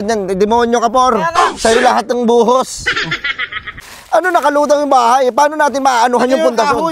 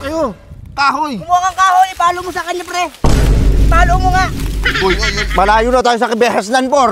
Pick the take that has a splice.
first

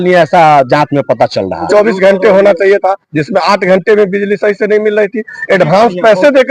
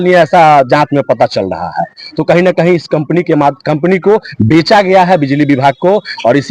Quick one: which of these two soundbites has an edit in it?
first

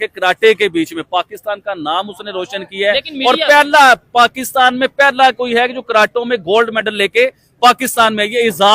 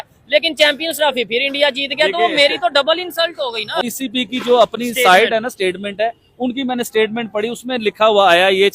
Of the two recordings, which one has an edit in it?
second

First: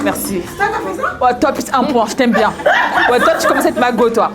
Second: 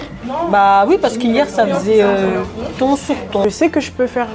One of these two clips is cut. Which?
second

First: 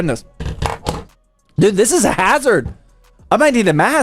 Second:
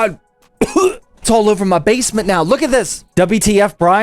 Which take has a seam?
second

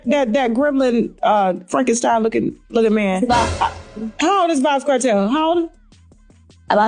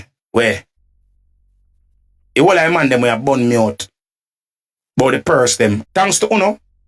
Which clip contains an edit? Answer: second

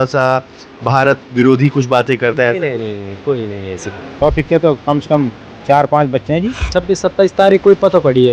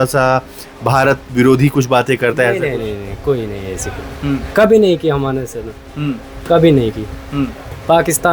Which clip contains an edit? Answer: first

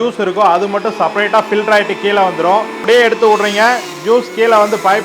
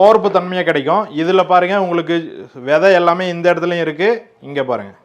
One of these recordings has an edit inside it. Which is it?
first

